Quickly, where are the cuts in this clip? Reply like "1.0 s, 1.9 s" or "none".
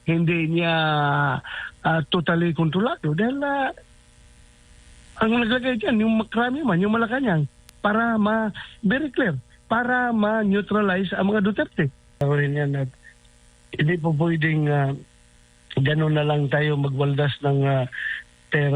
12.2 s